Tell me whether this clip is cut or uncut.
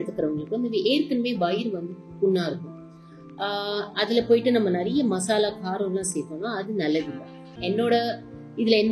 cut